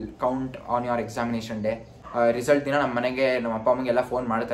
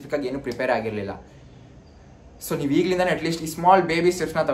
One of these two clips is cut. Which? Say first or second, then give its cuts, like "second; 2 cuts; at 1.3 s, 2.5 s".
first; 1 cut; at 2.0 s